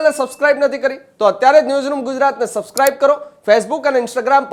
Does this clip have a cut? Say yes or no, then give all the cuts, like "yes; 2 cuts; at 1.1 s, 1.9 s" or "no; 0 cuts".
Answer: no; 0 cuts